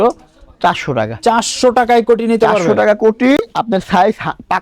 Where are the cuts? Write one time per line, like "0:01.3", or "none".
none